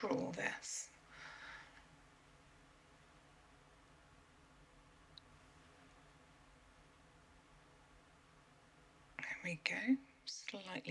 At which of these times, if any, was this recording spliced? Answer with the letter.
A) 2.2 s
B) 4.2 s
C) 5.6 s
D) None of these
D